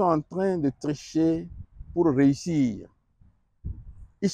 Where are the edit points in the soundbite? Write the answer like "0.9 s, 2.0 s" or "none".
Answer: none